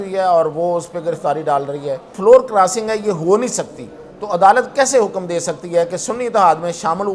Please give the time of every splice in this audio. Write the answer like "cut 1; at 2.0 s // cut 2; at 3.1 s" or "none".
cut 1; at 2.1 s